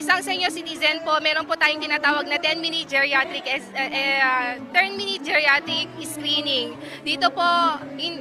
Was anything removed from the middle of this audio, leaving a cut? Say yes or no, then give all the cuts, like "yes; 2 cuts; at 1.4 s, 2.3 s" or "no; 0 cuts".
yes; 1 cut; at 4.4 s